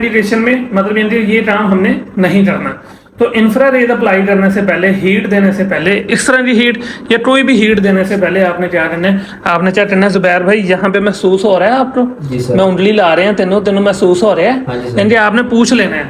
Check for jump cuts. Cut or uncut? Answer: uncut